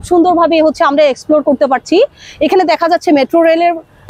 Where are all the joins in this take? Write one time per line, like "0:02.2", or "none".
none